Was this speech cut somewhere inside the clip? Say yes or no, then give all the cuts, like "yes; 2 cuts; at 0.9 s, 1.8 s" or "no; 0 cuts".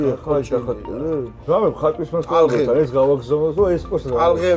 yes; 1 cut; at 1.3 s